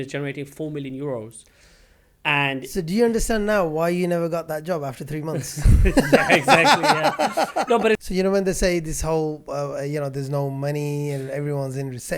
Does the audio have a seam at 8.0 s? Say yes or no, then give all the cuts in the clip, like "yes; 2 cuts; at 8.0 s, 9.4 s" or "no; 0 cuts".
yes; 1 cut; at 8.0 s